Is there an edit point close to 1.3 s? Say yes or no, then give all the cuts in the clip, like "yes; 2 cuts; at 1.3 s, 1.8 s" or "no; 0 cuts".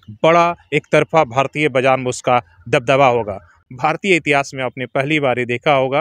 no; 1 cut; at 3.5 s